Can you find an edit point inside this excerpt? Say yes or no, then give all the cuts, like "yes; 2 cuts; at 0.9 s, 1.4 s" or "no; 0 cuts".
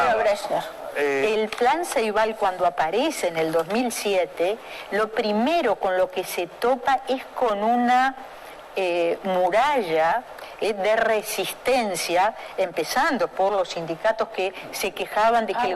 yes; 1 cut; at 1.2 s